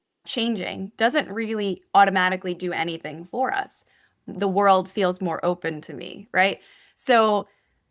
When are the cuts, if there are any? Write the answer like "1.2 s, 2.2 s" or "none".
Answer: 4.1 s